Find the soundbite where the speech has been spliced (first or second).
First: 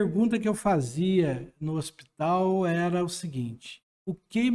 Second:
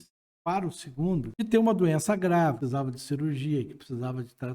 second